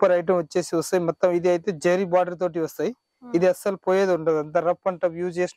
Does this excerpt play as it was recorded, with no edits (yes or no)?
yes